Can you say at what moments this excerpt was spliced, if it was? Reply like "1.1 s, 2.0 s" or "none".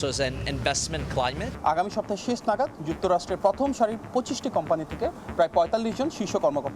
1.5 s